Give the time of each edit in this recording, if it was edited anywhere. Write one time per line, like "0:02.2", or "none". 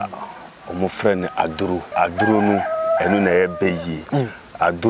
0:01.9